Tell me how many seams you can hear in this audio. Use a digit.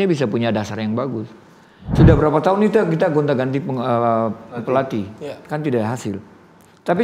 1